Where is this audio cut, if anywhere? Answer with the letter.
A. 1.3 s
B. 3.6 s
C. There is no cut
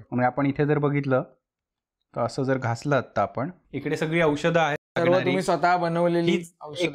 B